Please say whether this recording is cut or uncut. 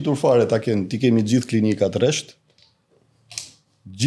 uncut